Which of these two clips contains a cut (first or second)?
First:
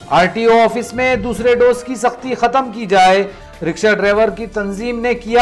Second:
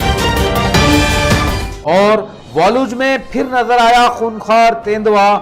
second